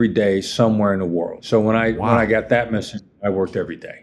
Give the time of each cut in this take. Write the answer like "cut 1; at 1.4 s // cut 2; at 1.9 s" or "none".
cut 1; at 1.4 s